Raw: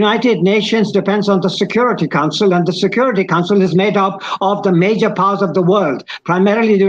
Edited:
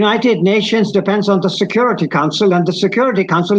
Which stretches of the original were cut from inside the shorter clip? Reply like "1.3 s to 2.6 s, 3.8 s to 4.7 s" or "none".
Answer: none